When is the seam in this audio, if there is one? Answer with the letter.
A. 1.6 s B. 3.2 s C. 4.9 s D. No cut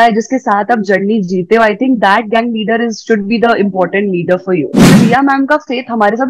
C